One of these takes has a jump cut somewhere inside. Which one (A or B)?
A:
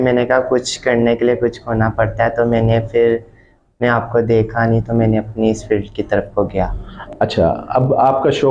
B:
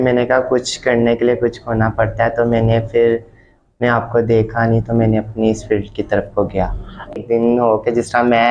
B